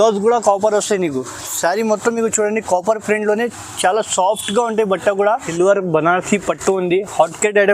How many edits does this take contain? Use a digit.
1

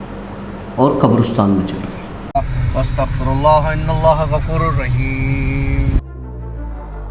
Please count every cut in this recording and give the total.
1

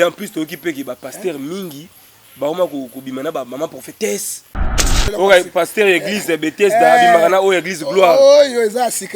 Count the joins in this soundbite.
1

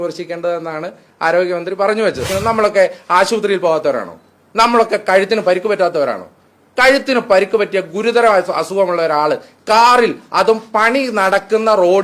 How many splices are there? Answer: 1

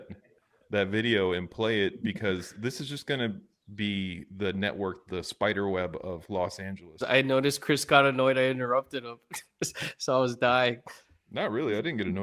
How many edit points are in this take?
1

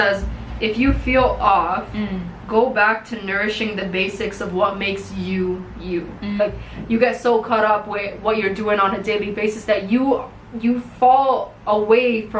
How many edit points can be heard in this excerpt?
1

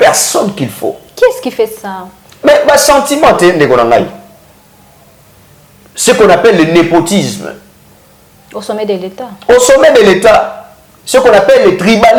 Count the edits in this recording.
0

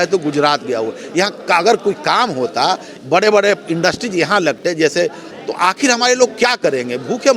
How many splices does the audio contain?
1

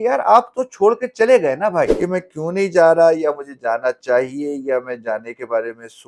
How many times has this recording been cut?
1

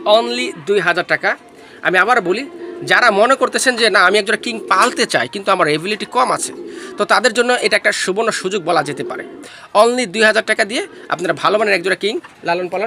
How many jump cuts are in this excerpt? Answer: 0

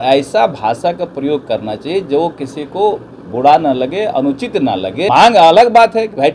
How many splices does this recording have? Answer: 1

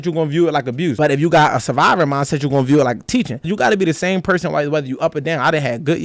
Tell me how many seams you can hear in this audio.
2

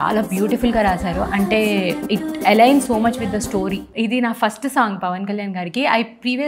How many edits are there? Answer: 1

